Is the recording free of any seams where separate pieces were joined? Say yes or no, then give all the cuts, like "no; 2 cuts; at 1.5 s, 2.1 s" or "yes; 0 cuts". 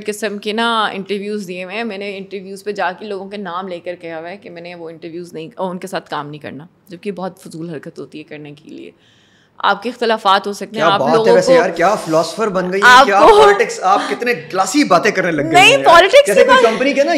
yes; 0 cuts